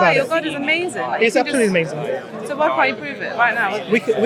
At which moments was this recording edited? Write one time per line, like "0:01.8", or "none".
none